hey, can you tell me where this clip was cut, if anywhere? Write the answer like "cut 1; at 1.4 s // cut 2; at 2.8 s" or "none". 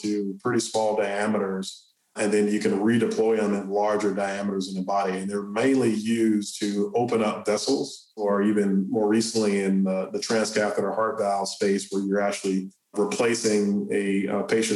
cut 1; at 8.2 s